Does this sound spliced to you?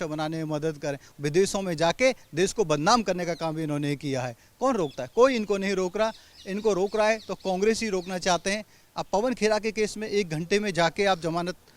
yes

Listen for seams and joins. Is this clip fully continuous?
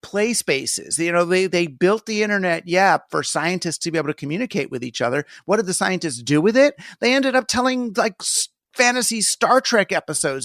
yes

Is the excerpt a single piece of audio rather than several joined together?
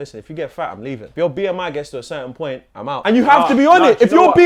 no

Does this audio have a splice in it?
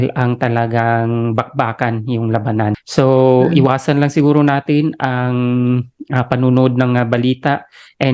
no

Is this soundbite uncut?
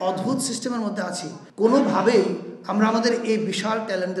yes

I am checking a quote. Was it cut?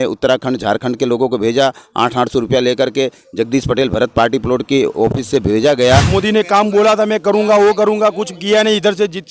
yes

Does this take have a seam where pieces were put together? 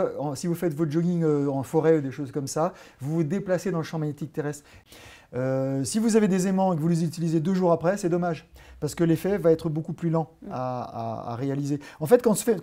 yes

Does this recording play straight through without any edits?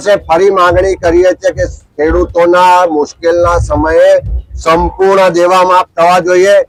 yes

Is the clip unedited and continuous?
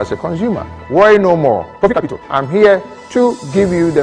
no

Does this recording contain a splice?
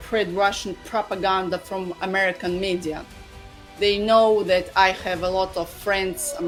no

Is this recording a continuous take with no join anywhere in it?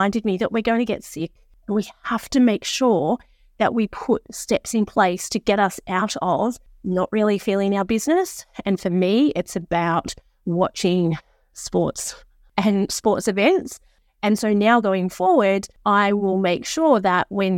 no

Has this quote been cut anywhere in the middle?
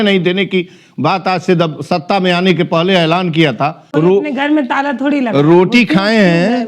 yes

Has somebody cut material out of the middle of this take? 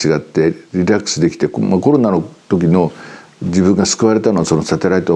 no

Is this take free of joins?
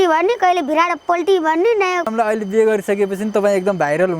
no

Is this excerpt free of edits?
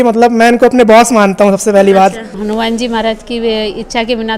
no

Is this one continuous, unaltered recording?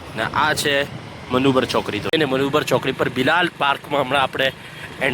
no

